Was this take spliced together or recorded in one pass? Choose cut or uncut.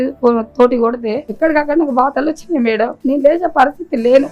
cut